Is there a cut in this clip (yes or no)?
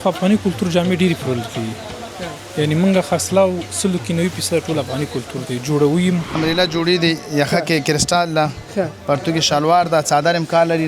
yes